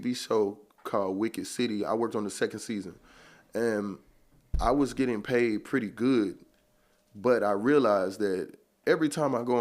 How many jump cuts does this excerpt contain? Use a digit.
1